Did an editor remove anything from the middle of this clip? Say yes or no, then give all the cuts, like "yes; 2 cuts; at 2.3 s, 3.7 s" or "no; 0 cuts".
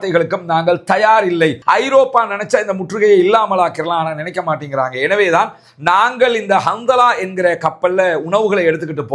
yes; 1 cut; at 1.6 s